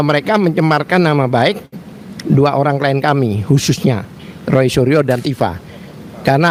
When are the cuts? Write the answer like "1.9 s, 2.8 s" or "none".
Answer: none